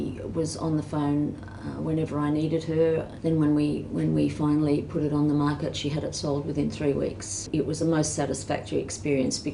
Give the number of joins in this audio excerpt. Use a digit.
0